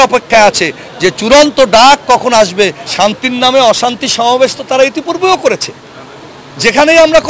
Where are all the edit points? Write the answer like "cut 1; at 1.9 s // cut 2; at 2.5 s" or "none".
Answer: cut 1; at 2.8 s